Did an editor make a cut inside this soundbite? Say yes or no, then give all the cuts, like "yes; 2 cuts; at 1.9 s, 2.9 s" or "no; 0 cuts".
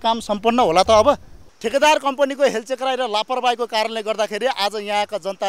yes; 1 cut; at 1.3 s